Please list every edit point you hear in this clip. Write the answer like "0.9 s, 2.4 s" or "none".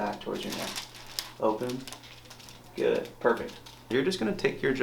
3.9 s